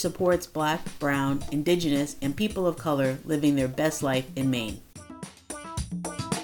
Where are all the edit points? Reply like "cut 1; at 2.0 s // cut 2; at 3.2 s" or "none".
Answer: cut 1; at 5.3 s